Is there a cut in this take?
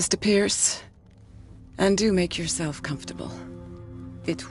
no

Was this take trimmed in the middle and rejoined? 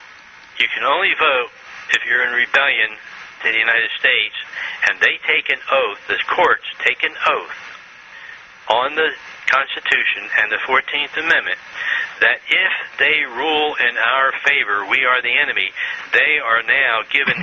yes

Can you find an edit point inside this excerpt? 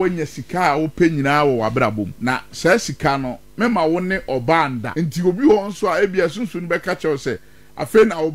yes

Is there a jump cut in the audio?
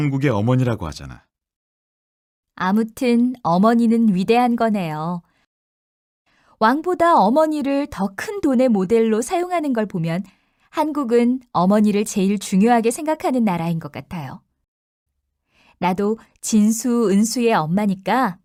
no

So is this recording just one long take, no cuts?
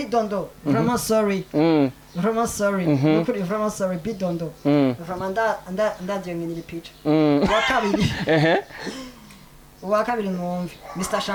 yes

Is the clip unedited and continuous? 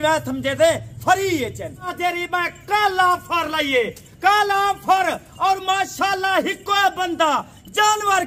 no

